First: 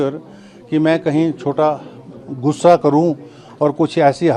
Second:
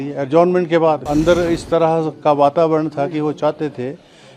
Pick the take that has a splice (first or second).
second